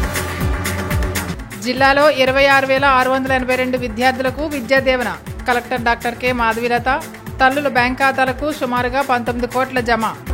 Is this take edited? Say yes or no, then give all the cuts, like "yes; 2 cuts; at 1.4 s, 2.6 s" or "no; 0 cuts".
no; 0 cuts